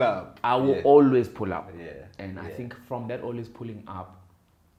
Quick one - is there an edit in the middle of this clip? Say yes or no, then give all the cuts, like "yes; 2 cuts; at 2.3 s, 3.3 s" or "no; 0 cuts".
no; 0 cuts